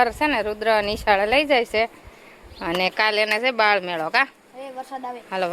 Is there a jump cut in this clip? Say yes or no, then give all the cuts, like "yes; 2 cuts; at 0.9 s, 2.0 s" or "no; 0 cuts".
no; 0 cuts